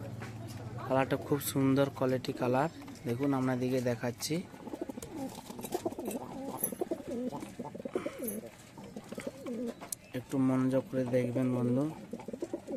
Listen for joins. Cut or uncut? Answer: uncut